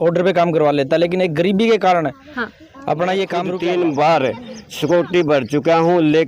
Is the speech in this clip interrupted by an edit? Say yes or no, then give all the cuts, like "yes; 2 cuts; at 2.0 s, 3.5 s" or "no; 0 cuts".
yes; 1 cut; at 3.5 s